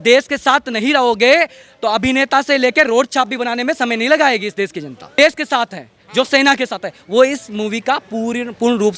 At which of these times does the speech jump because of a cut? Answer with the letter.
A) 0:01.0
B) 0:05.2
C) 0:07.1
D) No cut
B